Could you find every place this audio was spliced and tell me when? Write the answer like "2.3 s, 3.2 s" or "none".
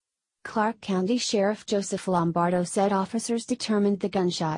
none